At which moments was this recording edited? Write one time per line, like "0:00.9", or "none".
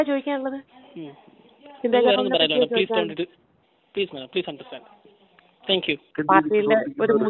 0:06.0